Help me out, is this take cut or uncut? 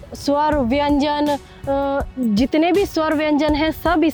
uncut